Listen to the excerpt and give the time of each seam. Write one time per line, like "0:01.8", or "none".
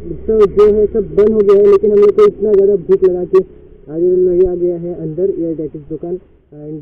none